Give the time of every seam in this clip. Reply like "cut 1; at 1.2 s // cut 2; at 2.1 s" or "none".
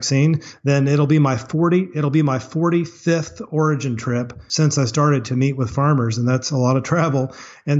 cut 1; at 4.4 s